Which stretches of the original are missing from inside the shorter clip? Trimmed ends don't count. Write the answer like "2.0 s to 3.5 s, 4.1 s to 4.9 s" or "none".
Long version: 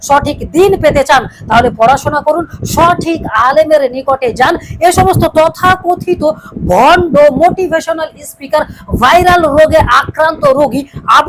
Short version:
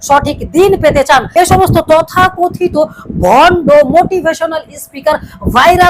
1.3 s to 4.7 s

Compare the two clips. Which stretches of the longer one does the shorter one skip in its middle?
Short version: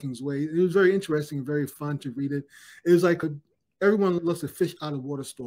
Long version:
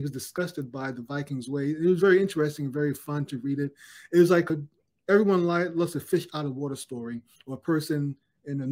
5.5 s to 5.7 s

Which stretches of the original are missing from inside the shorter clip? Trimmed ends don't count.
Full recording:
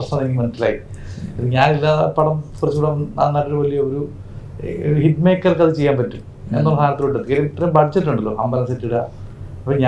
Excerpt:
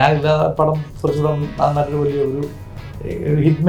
none

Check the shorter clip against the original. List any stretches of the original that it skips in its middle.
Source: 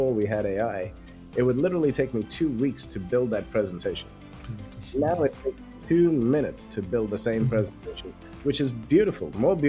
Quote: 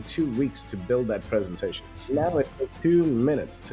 4.1 s to 4.7 s, 5.6 s to 5.8 s

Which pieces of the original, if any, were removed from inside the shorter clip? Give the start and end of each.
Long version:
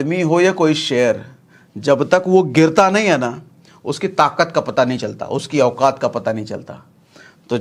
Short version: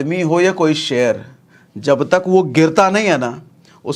none

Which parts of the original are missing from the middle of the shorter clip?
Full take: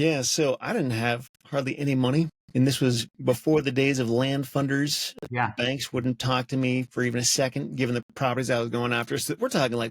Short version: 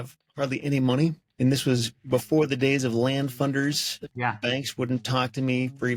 none

